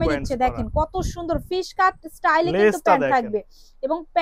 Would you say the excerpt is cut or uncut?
uncut